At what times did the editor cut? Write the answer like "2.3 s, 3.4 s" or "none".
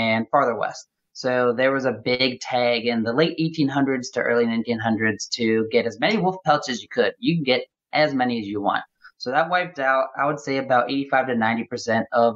none